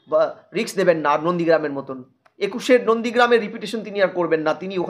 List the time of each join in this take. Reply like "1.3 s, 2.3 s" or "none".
none